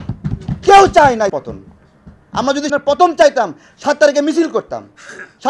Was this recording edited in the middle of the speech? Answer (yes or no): yes